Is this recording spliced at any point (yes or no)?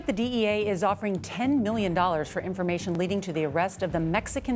no